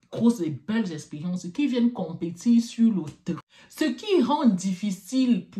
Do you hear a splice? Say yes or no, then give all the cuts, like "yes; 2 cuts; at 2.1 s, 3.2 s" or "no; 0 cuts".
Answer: yes; 1 cut; at 3.2 s